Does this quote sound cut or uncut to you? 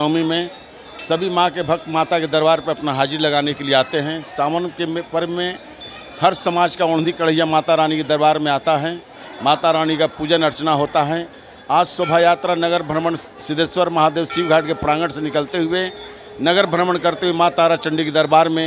uncut